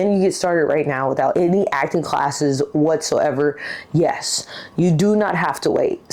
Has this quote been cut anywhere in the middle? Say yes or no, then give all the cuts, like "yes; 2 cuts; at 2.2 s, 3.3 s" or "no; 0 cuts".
yes; 1 cut; at 1.3 s